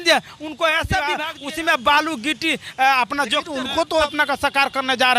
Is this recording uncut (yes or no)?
no